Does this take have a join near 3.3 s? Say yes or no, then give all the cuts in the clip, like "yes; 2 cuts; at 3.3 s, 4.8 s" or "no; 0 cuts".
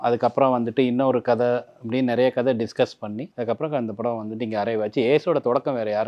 yes; 1 cut; at 3.3 s